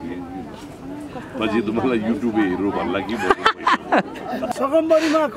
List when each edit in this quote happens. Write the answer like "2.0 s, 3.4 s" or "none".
4.4 s